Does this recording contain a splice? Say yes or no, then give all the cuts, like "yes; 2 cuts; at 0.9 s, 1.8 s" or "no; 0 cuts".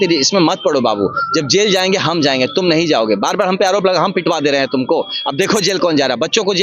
no; 0 cuts